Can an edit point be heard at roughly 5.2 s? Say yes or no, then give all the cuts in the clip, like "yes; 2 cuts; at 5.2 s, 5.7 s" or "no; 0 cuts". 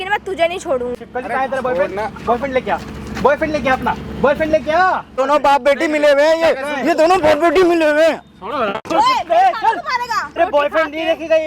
yes; 3 cuts; at 1.0 s, 5.2 s, 10.3 s